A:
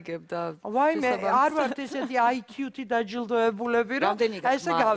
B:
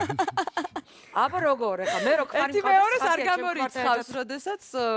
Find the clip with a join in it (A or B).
A